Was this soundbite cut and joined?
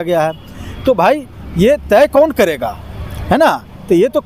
no; 0 cuts

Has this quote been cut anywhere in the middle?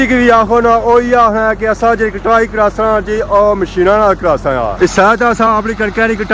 no; 0 cuts

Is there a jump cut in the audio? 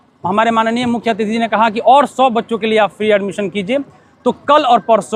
no; 0 cuts

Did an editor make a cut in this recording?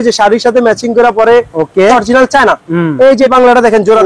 yes; 2 cuts; at 1.9 s, 3.3 s

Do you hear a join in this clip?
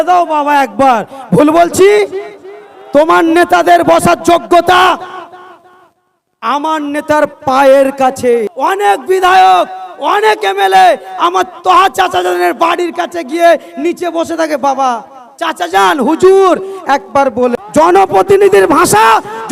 yes; 2 cuts; at 8.5 s, 17.6 s

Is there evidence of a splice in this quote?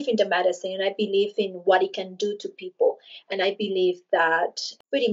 no; 0 cuts

